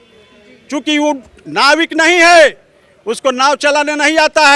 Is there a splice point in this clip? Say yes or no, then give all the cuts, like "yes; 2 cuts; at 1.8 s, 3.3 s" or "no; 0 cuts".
no; 0 cuts